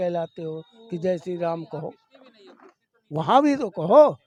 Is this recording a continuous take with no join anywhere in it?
yes; 0 cuts

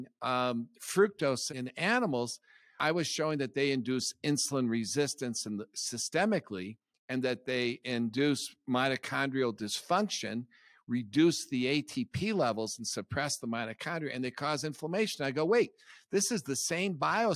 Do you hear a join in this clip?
yes; 2 cuts; at 1.5 s, 2.8 s

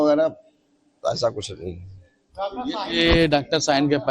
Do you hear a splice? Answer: no; 0 cuts

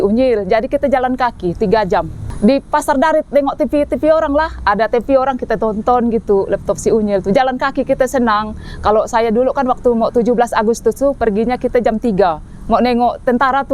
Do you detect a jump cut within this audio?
no; 0 cuts

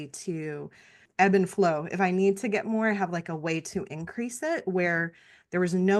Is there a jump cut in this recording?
yes; 1 cut; at 1.0 s

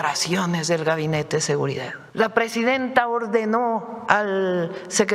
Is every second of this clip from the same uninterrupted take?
no; 1 cut; at 2.0 s

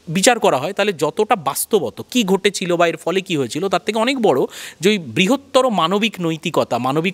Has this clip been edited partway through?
no; 0 cuts

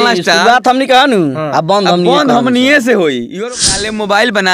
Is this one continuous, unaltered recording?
no; 1 cut; at 3.5 s

